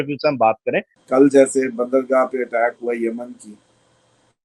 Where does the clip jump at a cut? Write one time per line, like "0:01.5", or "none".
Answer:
0:00.9